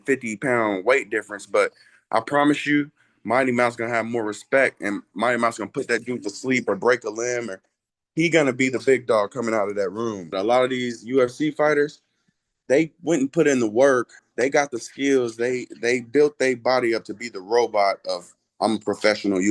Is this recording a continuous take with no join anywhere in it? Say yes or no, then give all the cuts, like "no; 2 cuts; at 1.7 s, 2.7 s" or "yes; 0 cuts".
no; 2 cuts; at 10.3 s, 14.2 s